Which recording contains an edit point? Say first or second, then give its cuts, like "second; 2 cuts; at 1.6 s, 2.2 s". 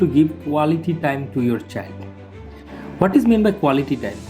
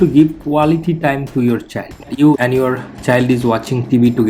second; 1 cut; at 2.3 s